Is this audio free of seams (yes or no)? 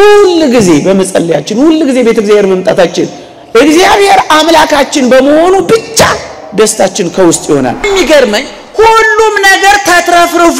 no